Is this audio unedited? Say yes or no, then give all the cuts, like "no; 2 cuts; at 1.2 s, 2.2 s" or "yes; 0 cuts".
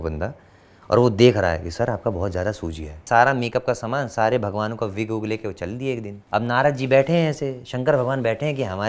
no; 2 cuts; at 3.0 s, 6.1 s